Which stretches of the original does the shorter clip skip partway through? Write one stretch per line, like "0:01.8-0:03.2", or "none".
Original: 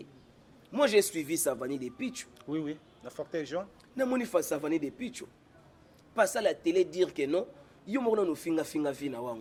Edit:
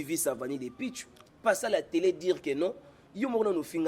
0:02.3-0:05.8